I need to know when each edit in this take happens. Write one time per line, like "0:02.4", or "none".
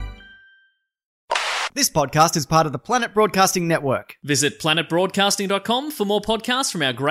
0:01.2